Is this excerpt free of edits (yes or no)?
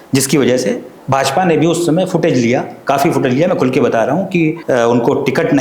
no